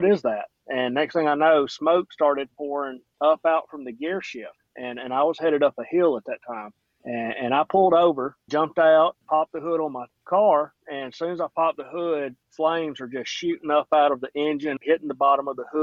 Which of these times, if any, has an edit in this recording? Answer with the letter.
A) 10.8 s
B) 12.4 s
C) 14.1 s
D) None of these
D